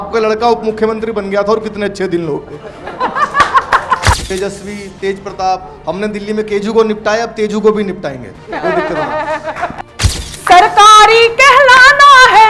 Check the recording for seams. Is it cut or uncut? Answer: cut